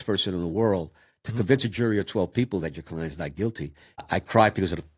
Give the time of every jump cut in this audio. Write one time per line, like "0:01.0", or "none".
0:04.0